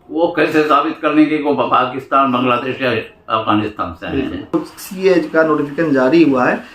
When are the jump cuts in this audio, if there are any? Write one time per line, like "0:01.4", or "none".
0:04.5